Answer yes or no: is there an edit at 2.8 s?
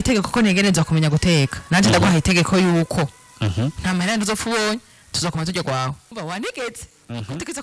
no